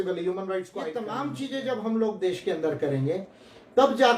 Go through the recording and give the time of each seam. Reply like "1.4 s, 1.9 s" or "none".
0.9 s